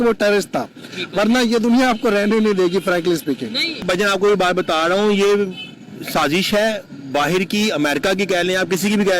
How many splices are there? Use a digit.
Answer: 1